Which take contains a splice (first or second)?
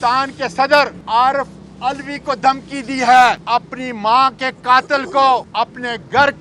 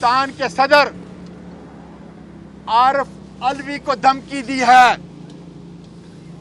first